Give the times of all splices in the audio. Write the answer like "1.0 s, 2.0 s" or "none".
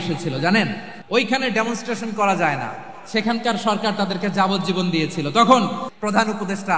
0.9 s, 5.9 s

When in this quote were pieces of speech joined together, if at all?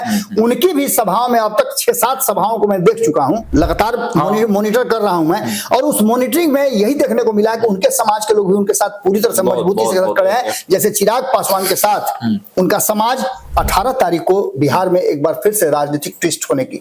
3.4 s, 13.4 s

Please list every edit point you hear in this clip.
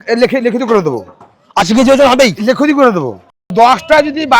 3.4 s

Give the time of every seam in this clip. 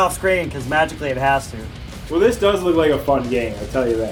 none

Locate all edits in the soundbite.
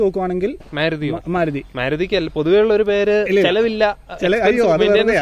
none

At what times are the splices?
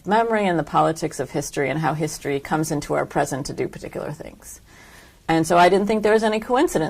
5.7 s

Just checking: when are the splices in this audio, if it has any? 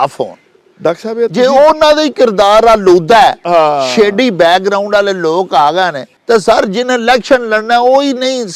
6.1 s

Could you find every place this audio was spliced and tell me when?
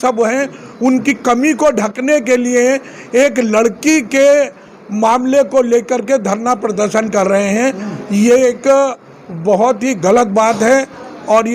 none

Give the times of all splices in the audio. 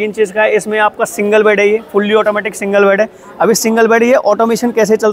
none

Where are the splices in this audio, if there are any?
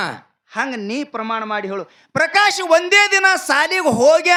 none

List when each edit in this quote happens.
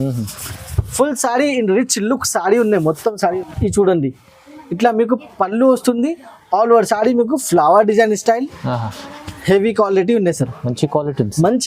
3.3 s

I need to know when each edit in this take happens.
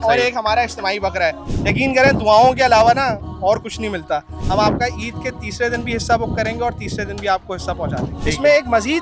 1.4 s, 4.4 s, 8.1 s

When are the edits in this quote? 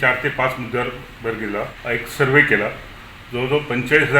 1.8 s

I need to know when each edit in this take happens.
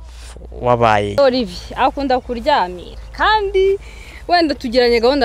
1.2 s

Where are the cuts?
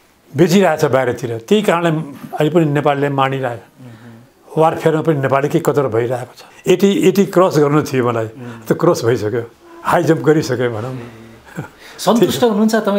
6.5 s

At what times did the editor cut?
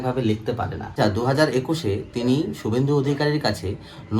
1.0 s

